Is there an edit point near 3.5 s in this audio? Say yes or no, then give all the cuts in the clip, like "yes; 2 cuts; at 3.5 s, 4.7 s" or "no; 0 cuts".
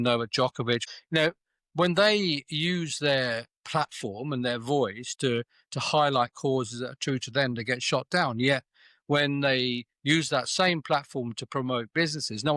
no; 1 cut; at 0.9 s